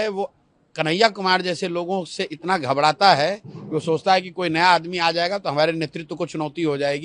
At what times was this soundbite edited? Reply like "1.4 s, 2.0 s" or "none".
none